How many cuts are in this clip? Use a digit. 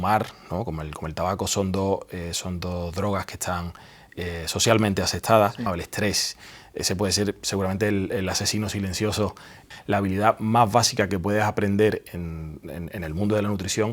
2